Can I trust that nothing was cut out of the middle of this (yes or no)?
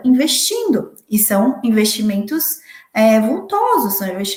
yes